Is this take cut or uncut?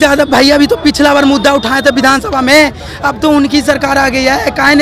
uncut